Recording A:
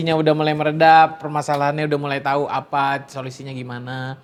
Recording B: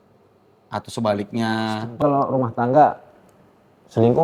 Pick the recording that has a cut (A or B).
B